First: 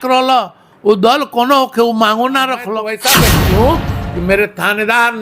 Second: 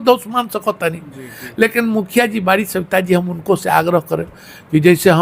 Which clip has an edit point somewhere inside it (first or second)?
first